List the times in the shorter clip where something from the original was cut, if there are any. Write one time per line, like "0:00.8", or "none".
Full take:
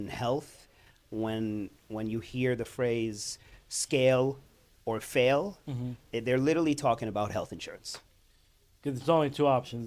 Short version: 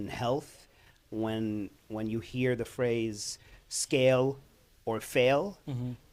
none